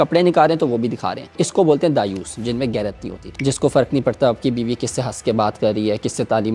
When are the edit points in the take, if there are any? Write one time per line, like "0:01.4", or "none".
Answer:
0:01.4